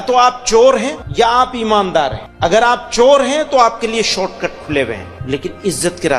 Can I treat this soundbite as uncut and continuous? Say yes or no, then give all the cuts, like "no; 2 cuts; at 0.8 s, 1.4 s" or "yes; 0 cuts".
no; 3 cuts; at 1.0 s, 2.2 s, 5.1 s